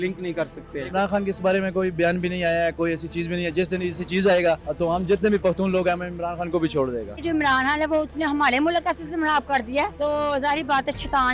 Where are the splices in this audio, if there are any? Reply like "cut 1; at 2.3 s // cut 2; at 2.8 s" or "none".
cut 1; at 0.9 s // cut 2; at 4.7 s // cut 3; at 7.2 s // cut 4; at 9.9 s